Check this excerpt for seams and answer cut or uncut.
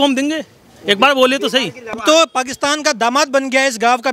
cut